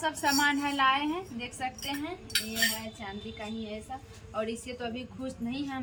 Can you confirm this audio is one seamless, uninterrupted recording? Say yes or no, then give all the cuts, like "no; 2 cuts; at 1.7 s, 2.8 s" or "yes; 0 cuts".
yes; 0 cuts